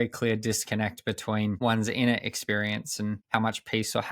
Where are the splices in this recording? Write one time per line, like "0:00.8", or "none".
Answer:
0:01.6
0:03.2